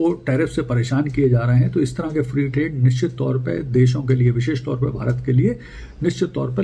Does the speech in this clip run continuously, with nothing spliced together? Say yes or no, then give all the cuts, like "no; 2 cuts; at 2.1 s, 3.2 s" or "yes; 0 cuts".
yes; 0 cuts